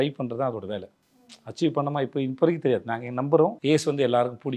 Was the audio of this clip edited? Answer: yes; 1 cut; at 3.6 s

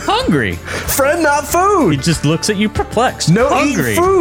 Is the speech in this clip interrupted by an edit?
no; 0 cuts

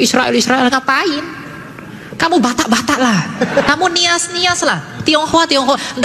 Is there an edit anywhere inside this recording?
no; 0 cuts

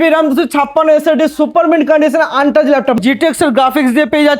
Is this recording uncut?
no; 1 cut; at 3.0 s

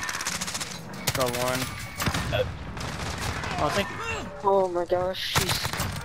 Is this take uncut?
yes; 0 cuts

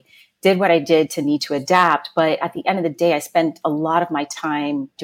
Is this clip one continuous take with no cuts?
yes; 0 cuts

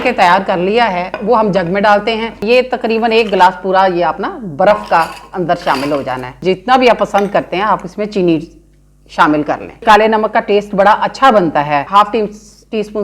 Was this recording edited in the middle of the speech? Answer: yes; 4 cuts; at 2.4 s, 6.4 s, 9.8 s, 11.9 s

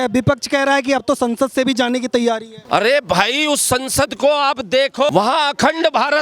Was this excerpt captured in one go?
no; 2 cuts; at 2.5 s, 5.1 s

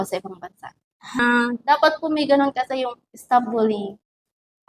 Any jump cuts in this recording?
yes; 1 cut; at 1.2 s

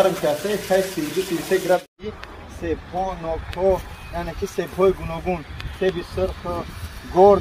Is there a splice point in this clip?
yes; 1 cut; at 1.9 s

